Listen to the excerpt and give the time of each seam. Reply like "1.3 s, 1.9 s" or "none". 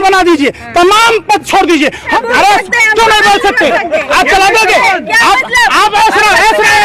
2.1 s

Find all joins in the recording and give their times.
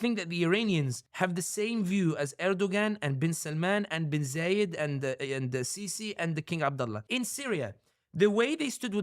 1.0 s, 7.0 s

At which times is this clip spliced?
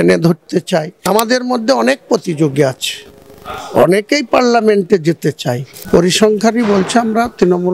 1.1 s, 5.7 s

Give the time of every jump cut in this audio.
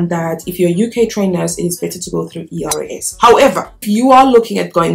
3.8 s

